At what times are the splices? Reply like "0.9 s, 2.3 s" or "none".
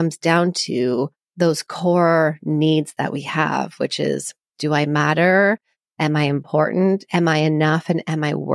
1.2 s